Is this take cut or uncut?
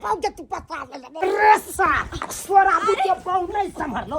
cut